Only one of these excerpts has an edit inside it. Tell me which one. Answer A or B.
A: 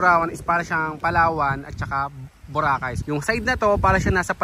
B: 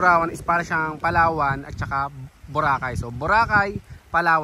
A